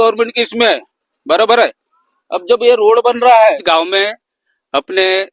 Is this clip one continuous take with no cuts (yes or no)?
no